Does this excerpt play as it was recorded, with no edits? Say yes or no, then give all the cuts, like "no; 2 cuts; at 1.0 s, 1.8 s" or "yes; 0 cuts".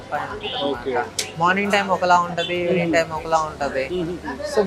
yes; 0 cuts